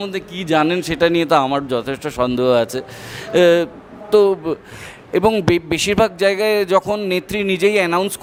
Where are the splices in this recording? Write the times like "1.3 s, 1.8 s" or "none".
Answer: none